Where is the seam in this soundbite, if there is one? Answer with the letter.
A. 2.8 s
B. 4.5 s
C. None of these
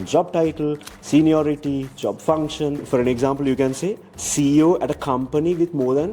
A